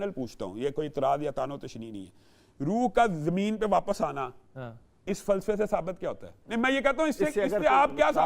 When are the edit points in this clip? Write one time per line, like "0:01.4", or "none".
0:06.3